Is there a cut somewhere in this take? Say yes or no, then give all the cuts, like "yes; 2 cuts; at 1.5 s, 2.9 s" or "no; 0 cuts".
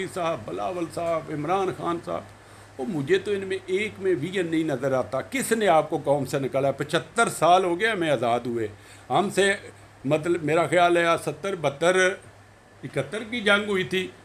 no; 0 cuts